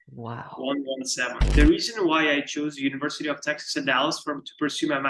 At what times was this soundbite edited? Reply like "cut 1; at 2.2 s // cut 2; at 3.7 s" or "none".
cut 1; at 1.4 s